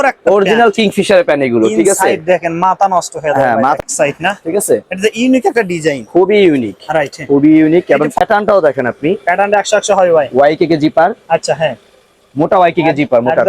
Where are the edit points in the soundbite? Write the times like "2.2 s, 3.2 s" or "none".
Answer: 3.8 s, 8.2 s